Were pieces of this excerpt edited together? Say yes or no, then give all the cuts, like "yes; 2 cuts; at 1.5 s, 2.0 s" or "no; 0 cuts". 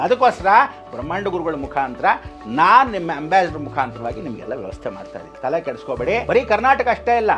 yes; 1 cut; at 6.2 s